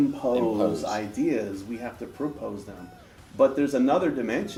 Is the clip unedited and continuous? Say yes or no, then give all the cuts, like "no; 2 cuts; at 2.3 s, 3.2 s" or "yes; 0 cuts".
yes; 0 cuts